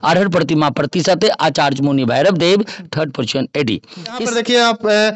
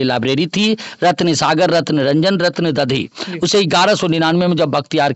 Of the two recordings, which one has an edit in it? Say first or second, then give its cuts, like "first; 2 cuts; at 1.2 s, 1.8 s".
first; 1 cut; at 4.2 s